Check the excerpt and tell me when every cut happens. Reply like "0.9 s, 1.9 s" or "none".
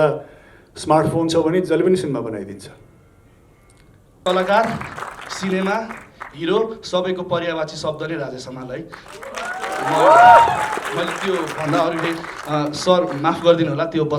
4.2 s